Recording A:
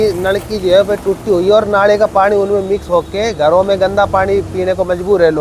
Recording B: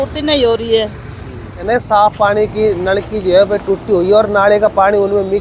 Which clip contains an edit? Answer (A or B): B